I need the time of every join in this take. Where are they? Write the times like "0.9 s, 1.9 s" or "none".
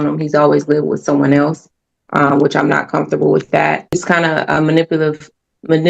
4.0 s